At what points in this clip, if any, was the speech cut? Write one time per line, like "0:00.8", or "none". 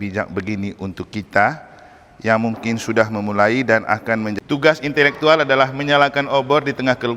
0:04.4